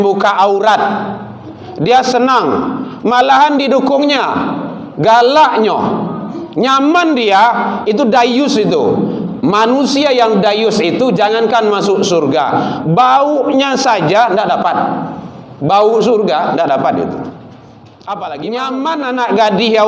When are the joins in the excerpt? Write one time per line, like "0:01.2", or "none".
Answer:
0:18.5